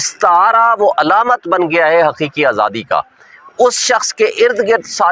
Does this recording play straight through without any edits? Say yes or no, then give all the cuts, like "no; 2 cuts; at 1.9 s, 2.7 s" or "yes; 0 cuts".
yes; 0 cuts